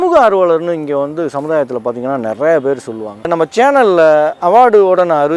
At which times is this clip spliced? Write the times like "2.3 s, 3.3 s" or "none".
3.3 s